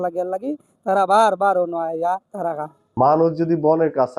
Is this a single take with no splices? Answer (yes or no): no